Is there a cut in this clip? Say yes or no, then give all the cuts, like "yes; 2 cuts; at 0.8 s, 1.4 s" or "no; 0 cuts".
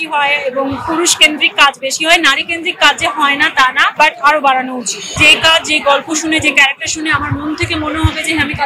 yes; 2 cuts; at 4.0 s, 5.2 s